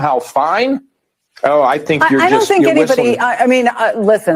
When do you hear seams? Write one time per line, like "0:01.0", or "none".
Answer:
0:02.8